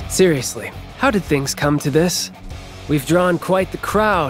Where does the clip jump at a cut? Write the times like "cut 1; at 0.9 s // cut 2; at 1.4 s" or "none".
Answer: cut 1; at 2.6 s